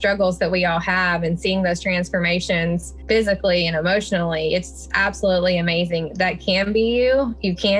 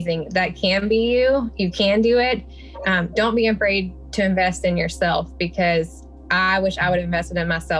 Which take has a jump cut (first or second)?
first